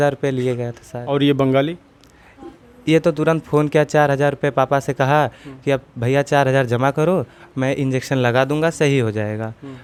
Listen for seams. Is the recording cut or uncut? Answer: uncut